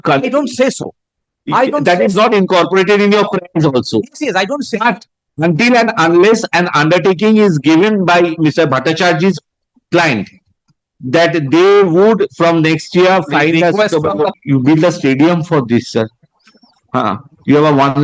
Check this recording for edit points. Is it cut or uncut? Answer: cut